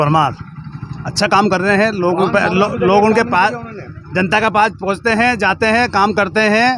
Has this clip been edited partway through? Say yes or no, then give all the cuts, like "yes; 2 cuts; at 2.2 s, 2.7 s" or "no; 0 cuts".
no; 0 cuts